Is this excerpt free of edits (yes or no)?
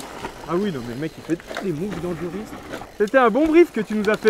no